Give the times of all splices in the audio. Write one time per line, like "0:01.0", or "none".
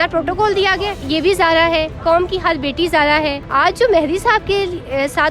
0:01.0
0:03.4